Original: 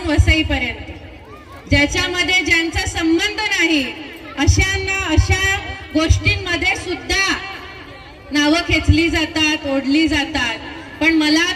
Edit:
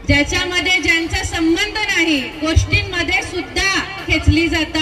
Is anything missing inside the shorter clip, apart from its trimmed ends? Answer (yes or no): yes